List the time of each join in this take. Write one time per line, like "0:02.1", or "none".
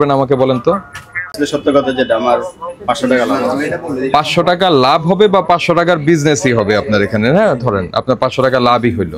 0:01.4